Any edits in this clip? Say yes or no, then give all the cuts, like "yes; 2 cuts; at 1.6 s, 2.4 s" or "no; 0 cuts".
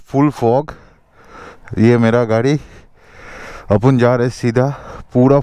no; 0 cuts